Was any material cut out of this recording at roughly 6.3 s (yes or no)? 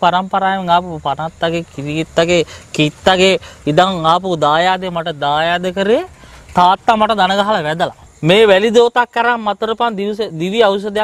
no